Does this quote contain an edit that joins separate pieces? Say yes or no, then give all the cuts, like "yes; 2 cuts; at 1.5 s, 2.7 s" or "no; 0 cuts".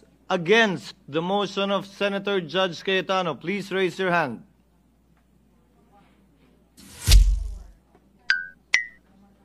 no; 0 cuts